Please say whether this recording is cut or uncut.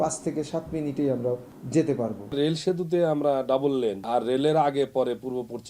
cut